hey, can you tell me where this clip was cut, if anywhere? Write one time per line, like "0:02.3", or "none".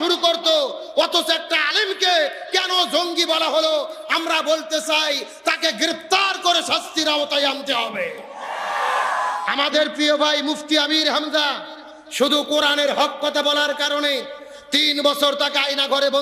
0:09.5